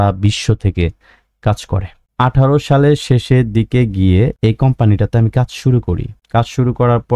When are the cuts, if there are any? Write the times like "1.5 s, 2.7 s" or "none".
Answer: 2.0 s